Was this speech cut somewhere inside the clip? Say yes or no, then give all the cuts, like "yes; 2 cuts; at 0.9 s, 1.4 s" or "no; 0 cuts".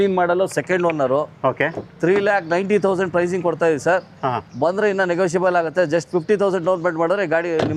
no; 0 cuts